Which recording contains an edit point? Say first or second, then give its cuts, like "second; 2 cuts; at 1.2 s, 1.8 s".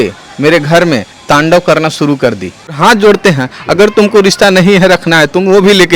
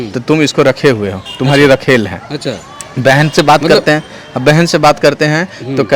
first; 1 cut; at 2.8 s